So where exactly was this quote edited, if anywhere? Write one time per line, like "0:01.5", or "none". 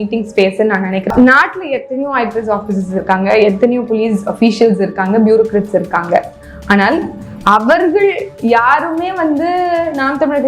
0:01.1